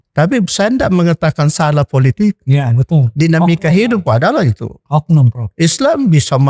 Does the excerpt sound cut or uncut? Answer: uncut